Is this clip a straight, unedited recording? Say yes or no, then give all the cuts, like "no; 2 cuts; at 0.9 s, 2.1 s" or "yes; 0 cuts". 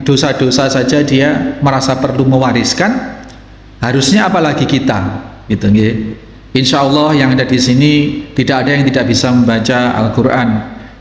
yes; 0 cuts